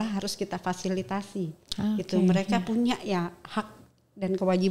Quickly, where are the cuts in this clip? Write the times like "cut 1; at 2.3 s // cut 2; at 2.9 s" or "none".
none